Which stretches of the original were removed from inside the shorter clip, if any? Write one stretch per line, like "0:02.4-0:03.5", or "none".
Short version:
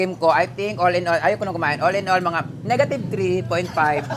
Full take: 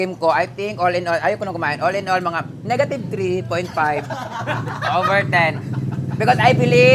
none